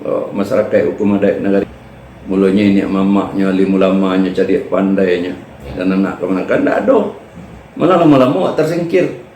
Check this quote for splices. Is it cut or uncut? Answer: cut